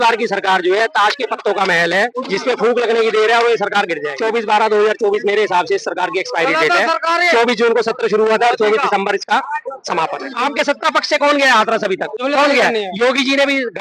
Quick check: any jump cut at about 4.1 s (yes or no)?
yes